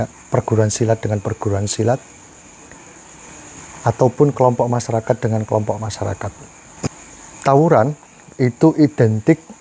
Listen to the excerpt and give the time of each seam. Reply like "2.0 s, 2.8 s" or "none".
6.9 s